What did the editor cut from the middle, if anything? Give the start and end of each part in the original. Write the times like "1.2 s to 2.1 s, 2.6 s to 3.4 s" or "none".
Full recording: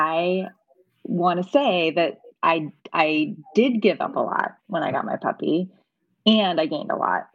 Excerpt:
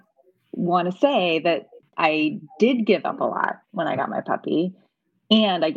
2.3 s to 2.7 s